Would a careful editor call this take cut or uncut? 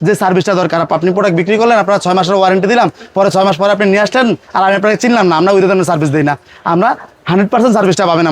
uncut